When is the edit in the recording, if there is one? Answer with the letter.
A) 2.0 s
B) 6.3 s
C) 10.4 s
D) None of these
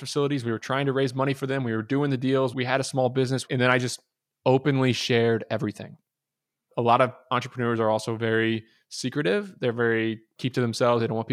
C